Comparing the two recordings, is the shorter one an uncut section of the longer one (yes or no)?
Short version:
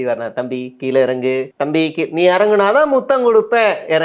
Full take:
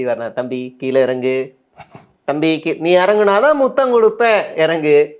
no